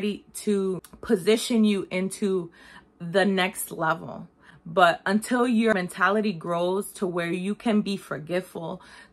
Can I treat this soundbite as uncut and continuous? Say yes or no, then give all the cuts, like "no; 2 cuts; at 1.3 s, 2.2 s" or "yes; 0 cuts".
no; 2 cuts; at 0.9 s, 5.7 s